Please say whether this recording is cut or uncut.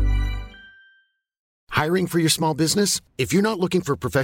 cut